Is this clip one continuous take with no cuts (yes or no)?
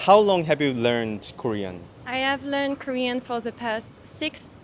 yes